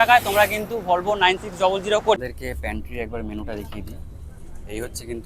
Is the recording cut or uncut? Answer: cut